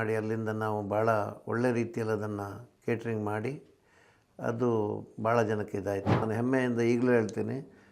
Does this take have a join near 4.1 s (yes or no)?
no